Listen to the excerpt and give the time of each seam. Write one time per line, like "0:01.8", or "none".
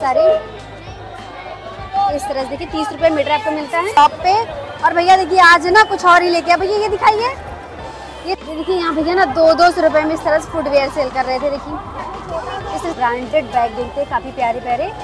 0:04.0
0:08.4
0:12.9